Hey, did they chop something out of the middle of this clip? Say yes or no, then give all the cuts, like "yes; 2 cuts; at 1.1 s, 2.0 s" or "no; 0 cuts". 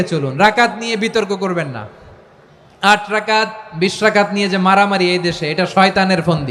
no; 0 cuts